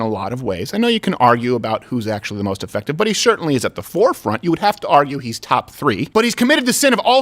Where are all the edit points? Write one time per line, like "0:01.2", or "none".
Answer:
0:06.0